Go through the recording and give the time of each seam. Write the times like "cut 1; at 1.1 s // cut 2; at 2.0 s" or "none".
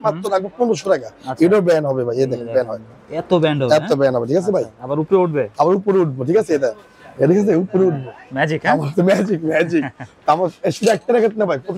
none